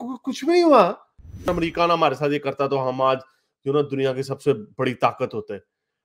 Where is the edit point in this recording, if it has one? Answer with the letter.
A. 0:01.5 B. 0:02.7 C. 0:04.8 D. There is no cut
A